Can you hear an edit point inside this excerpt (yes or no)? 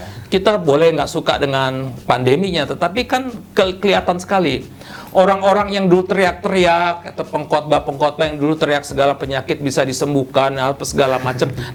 no